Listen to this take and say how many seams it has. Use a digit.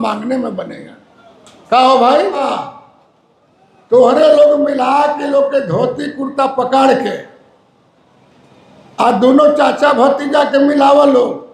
1